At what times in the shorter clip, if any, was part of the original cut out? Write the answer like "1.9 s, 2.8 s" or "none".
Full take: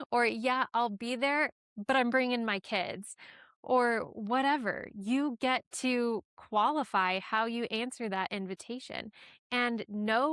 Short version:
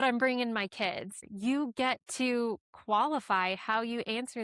1.2 s

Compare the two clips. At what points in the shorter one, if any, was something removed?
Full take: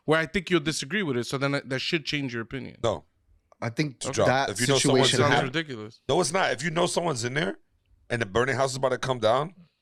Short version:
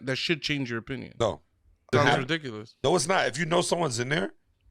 1.9 s

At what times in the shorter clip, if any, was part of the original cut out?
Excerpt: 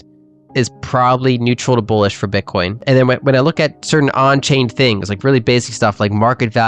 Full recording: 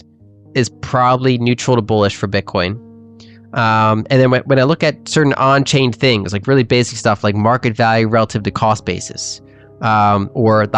2.8 s

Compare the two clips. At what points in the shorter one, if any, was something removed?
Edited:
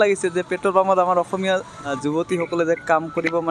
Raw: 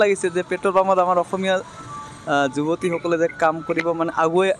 2.0 s

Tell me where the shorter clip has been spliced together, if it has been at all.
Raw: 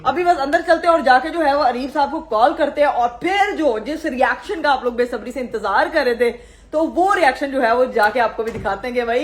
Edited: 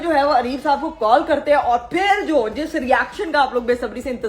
none

